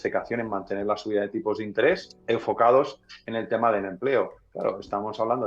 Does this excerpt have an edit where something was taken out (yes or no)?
yes